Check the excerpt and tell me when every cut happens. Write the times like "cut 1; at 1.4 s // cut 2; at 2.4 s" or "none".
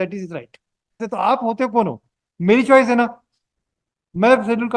cut 1; at 1.1 s